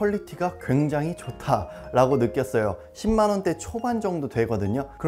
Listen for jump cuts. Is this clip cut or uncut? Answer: uncut